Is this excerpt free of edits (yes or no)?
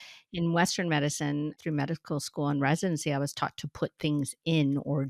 no